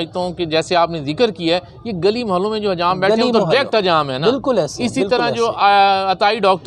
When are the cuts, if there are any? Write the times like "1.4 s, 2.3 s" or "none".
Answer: none